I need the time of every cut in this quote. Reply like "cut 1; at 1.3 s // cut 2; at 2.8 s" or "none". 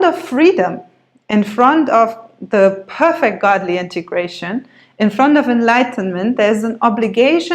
none